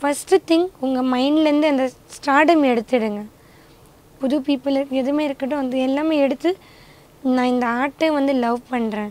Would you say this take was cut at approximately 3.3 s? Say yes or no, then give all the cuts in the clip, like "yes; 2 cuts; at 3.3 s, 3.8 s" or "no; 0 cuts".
no; 0 cuts